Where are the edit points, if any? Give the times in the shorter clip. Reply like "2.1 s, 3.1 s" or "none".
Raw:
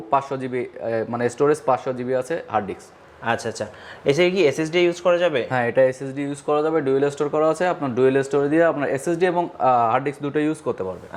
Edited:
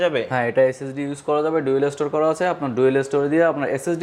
none